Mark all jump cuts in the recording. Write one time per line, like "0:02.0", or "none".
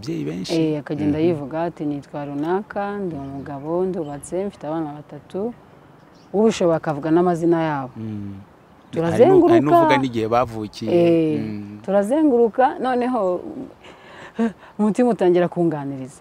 none